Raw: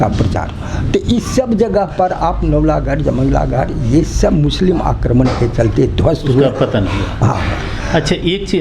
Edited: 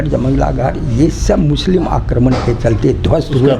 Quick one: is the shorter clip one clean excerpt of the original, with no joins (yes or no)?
yes